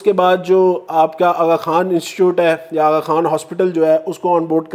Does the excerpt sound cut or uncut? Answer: uncut